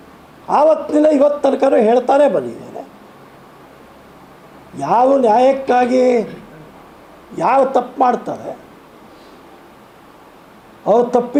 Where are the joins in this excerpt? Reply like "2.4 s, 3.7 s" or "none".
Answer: none

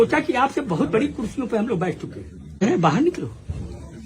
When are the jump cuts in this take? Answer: 2.6 s

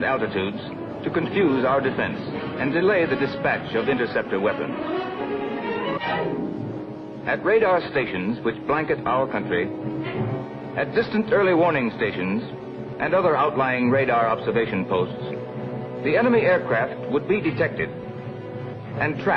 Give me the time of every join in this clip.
13.9 s

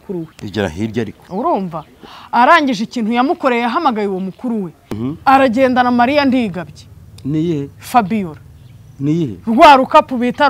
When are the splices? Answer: 5.0 s

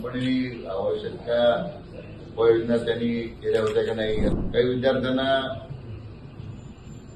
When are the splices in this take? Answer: 4.3 s

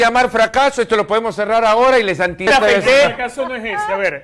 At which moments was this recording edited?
2.5 s

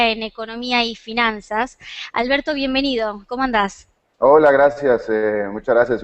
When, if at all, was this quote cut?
4.1 s

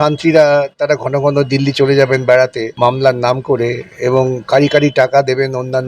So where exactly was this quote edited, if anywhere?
2.6 s

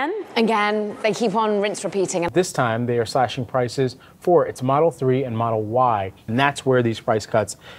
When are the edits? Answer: 2.3 s, 6.2 s

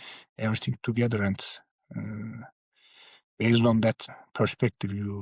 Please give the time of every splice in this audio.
4.1 s

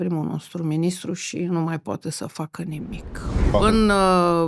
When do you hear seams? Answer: 3.5 s

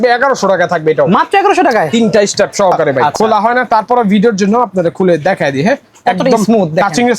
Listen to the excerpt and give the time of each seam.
3.0 s

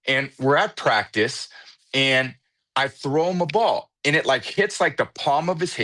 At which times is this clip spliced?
none

